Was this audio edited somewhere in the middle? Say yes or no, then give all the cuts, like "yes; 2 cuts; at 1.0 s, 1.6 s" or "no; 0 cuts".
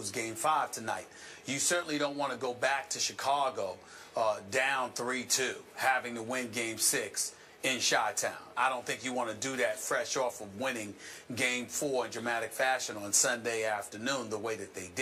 no; 0 cuts